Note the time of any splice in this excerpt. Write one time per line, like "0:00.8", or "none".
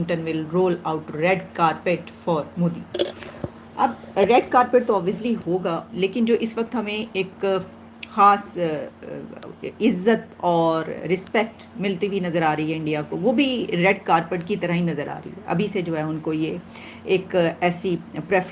none